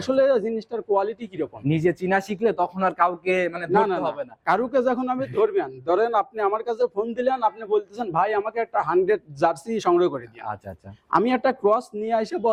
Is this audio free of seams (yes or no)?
yes